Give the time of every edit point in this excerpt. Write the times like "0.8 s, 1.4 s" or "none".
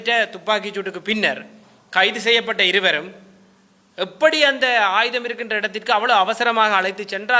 none